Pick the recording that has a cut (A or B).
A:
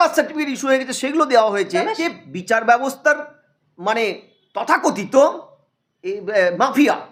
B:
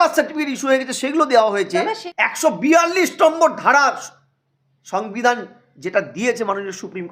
B